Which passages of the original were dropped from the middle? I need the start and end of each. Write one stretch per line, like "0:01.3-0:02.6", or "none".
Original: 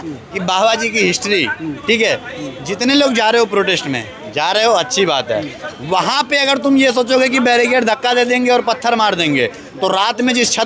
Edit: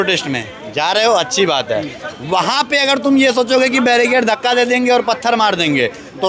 none